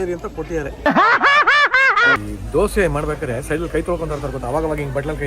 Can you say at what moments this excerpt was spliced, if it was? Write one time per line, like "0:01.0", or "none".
0:02.2